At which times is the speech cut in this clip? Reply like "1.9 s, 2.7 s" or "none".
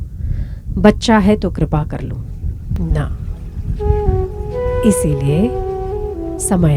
2.8 s

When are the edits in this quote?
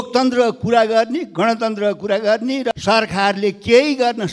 2.7 s

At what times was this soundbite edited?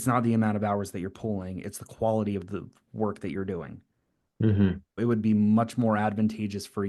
5.0 s

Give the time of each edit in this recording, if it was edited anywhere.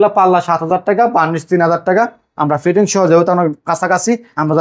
none

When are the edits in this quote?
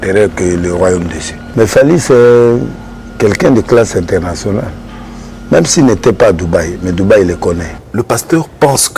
1.4 s, 7.7 s

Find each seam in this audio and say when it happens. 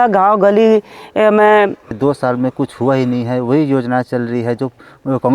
1.9 s

